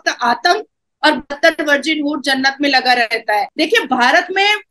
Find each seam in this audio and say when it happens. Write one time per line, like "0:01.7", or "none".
0:03.5